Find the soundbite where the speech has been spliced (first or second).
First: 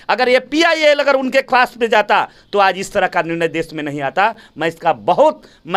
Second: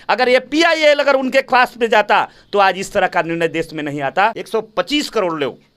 second